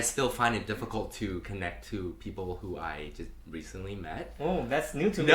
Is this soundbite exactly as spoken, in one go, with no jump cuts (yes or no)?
yes